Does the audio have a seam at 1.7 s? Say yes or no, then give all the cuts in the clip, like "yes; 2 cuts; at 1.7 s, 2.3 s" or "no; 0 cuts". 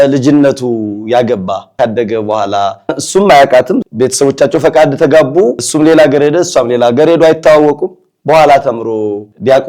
yes; 1 cut; at 1.7 s